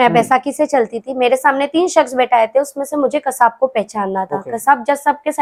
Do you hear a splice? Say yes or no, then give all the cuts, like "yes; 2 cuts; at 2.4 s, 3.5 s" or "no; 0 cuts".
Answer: no; 0 cuts